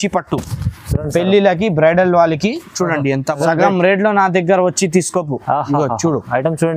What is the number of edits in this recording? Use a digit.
1